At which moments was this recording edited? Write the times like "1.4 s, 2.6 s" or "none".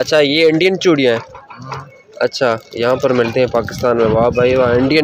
none